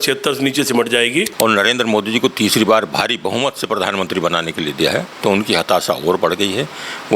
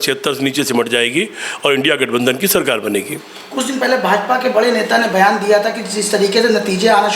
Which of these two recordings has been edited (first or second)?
first